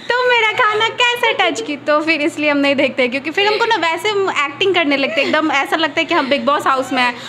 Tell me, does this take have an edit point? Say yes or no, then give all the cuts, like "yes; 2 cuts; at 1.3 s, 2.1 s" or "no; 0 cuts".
no; 0 cuts